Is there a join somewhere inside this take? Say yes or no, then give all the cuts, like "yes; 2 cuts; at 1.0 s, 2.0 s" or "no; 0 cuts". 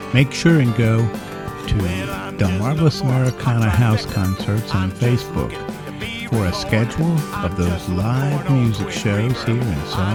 no; 0 cuts